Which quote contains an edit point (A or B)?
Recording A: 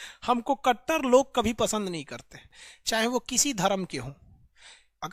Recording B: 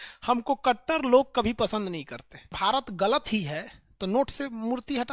B